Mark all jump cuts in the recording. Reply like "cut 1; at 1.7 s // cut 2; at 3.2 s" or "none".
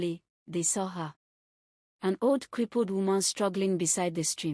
cut 1; at 3.6 s